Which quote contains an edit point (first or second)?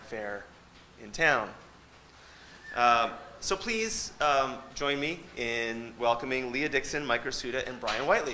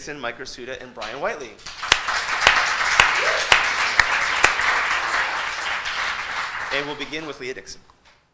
first